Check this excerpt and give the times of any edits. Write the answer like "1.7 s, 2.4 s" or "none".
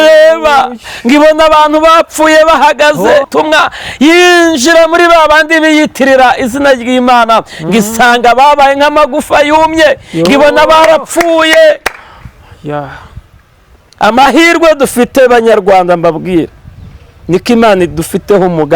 3.3 s